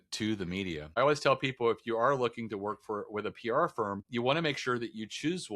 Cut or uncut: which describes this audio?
cut